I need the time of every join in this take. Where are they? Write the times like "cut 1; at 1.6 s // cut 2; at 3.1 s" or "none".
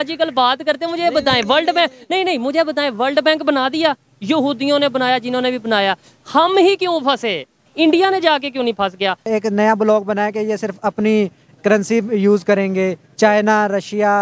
cut 1; at 7.6 s // cut 2; at 9.3 s